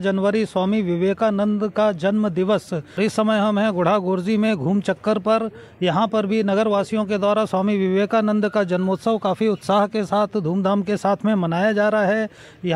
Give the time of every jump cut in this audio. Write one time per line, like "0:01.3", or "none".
0:03.0